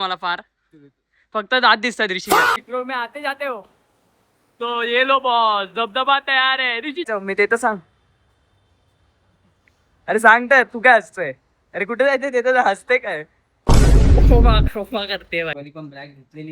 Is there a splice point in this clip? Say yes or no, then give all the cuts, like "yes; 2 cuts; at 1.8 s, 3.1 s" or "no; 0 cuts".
yes; 3 cuts; at 2.6 s, 7.1 s, 15.5 s